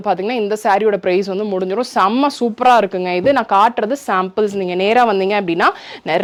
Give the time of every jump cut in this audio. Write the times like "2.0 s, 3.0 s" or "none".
none

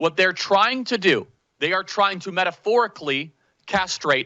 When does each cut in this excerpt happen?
1.4 s

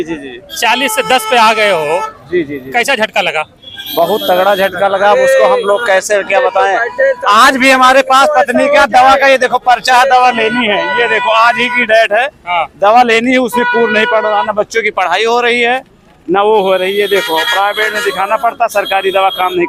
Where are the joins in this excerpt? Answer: none

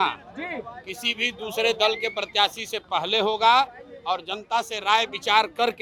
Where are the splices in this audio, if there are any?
none

